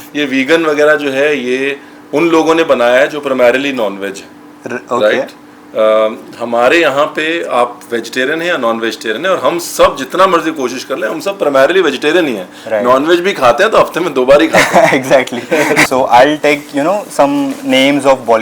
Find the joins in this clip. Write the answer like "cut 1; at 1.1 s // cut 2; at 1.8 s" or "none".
cut 1; at 15.9 s